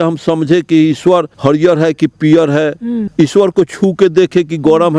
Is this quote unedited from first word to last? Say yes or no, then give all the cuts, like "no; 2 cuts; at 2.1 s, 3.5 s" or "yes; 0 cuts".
no; 2 cuts; at 1.3 s, 3.0 s